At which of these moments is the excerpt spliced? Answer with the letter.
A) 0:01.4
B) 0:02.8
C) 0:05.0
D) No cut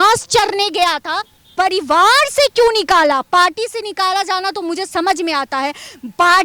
A